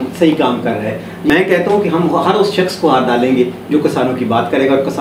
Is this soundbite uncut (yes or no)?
no